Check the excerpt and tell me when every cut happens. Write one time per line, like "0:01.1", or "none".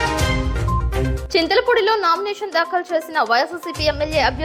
none